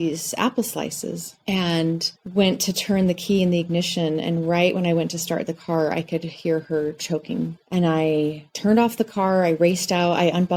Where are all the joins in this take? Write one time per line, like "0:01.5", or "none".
none